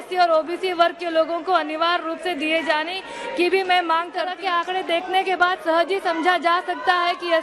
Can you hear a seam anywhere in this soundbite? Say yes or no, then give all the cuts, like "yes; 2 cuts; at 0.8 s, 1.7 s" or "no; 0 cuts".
yes; 1 cut; at 4.3 s